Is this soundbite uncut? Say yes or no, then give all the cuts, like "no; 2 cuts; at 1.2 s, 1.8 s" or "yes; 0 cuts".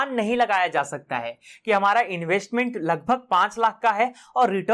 yes; 0 cuts